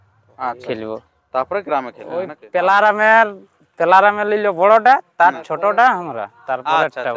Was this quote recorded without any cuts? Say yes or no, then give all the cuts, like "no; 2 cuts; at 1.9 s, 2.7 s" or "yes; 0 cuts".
no; 1 cut; at 2.4 s